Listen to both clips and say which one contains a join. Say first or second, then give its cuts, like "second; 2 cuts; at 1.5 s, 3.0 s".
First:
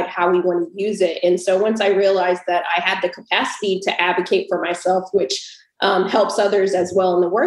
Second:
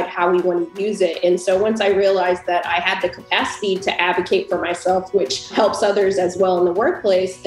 second; 1 cut; at 5.5 s